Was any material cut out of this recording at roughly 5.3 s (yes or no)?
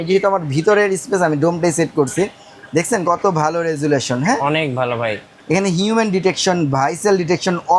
yes